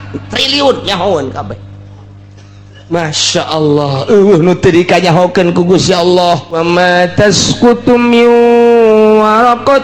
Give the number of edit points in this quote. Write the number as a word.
one